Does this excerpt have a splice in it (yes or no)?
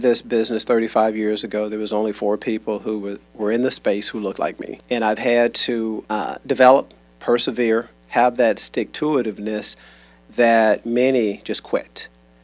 yes